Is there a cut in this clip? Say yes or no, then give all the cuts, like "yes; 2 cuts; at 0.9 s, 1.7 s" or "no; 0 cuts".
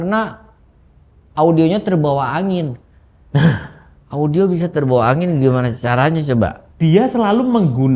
yes; 1 cut; at 6.6 s